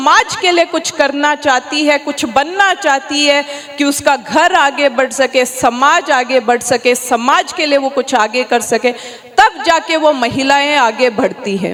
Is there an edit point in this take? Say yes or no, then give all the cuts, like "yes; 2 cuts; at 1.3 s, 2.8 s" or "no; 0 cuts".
no; 0 cuts